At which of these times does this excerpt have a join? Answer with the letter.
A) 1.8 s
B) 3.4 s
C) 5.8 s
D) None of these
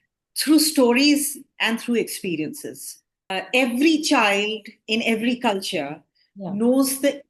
B